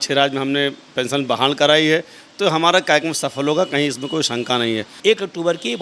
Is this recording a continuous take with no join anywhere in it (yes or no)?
no